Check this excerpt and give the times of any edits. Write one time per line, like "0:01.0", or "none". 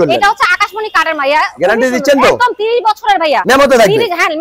none